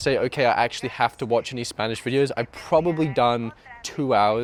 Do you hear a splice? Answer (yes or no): no